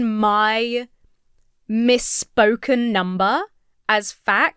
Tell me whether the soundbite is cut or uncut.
uncut